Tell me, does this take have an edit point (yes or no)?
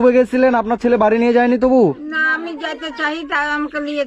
no